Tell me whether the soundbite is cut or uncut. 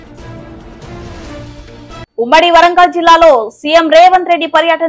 uncut